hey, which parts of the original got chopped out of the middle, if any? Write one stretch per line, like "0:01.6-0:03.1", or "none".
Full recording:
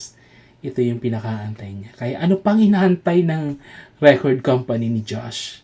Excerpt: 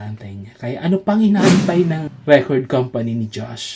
0:03.5-0:03.8